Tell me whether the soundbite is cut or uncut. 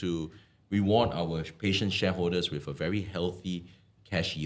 uncut